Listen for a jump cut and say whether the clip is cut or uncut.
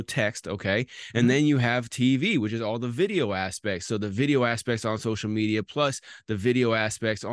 uncut